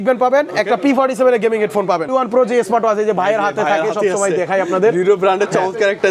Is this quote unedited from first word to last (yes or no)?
no